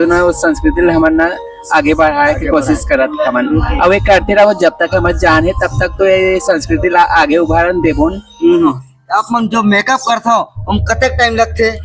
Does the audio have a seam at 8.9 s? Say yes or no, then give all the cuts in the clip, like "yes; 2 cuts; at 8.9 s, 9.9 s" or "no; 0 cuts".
yes; 1 cut; at 8.9 s